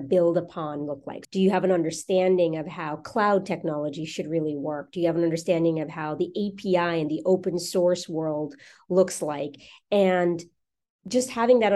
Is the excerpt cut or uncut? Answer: cut